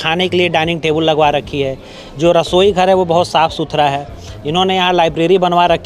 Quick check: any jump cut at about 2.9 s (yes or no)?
no